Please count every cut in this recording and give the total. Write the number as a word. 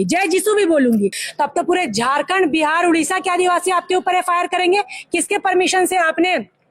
one